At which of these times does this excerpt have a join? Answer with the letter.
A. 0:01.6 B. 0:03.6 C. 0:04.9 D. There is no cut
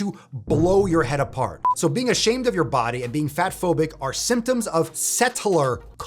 A